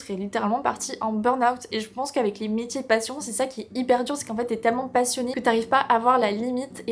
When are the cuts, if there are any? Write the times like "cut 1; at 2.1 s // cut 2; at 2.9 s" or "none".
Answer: none